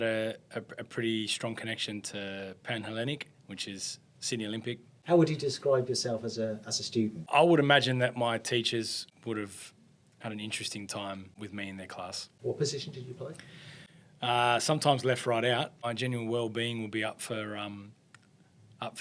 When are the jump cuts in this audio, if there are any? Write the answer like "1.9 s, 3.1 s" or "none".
4.9 s, 7.2 s, 9.1 s, 11.9 s, 15.8 s